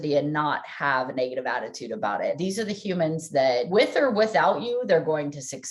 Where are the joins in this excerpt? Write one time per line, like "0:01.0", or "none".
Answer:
0:02.4
0:03.7